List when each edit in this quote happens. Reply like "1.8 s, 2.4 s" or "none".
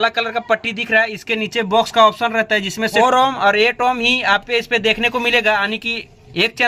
none